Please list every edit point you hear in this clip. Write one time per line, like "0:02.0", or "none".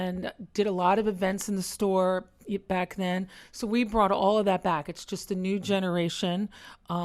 none